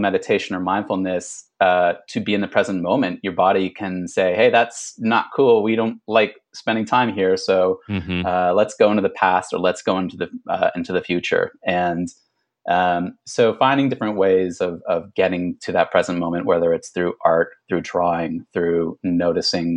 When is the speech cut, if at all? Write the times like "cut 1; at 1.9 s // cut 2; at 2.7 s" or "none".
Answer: none